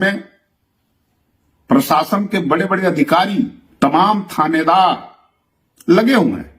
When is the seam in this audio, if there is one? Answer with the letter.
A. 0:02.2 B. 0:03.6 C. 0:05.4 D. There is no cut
B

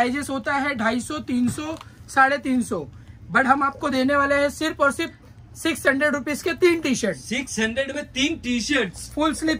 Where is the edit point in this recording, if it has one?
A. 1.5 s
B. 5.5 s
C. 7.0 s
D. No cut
D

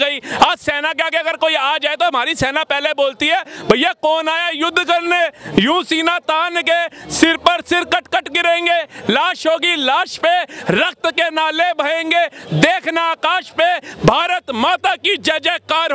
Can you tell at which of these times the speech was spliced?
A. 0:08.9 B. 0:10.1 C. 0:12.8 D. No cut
D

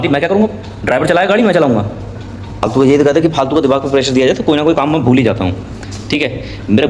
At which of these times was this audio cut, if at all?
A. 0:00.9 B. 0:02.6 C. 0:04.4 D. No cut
B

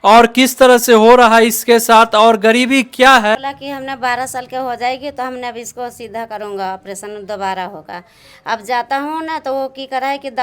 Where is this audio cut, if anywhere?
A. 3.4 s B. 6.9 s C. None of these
A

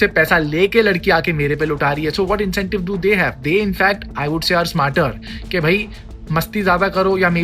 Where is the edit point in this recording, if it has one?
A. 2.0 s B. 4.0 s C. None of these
C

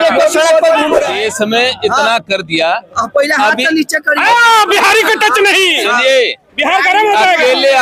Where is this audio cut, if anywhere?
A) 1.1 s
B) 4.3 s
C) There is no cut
A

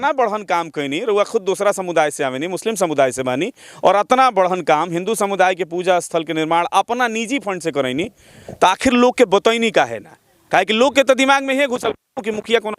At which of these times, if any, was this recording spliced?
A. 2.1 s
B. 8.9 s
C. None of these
C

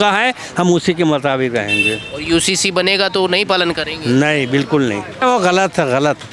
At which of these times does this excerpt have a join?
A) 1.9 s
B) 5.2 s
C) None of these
B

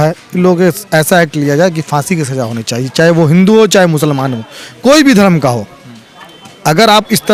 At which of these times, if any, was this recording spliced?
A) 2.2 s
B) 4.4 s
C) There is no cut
C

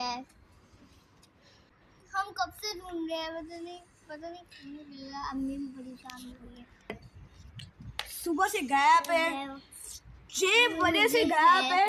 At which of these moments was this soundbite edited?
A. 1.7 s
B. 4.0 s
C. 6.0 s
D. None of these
A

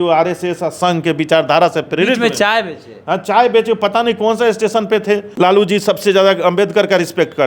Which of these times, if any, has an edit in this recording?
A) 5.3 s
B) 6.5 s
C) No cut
A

